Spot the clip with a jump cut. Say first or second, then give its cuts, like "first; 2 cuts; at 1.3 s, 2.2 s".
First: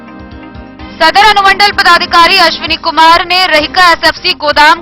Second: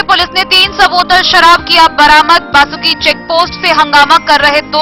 first; 1 cut; at 1.0 s